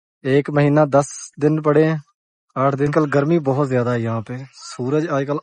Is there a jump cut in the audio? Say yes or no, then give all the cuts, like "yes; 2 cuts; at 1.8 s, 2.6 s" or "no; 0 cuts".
yes; 1 cut; at 2.9 s